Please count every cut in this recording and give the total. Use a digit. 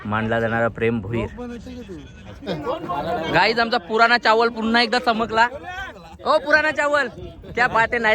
1